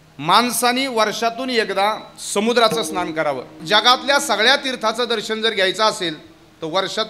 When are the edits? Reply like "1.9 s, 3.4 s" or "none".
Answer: 3.6 s